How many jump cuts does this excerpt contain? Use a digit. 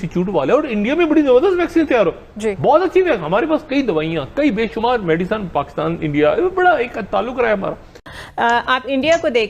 1